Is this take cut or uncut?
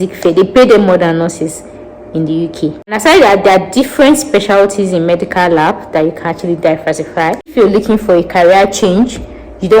cut